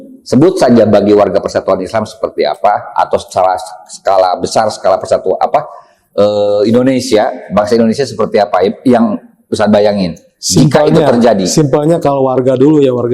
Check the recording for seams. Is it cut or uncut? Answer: uncut